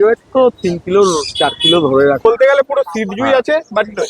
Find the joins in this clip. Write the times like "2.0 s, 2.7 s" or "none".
2.2 s